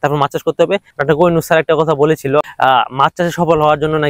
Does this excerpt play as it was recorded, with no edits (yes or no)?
no